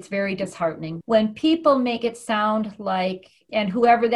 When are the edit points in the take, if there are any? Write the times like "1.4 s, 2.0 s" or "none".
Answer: 1.0 s